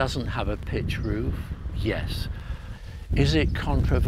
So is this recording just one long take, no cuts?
no; 1 cut; at 2.7 s

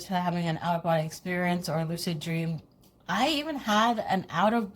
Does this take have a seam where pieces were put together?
no; 0 cuts

